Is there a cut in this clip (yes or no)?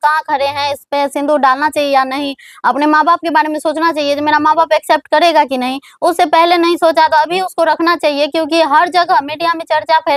no